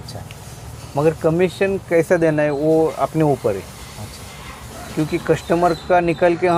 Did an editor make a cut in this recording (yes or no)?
no